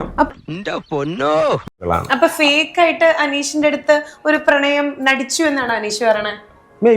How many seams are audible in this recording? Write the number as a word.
one